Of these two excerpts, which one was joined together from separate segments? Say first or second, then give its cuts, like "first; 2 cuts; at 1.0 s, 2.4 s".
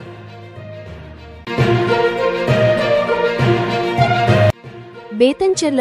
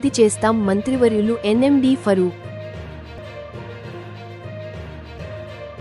first; 2 cuts; at 1.3 s, 4.5 s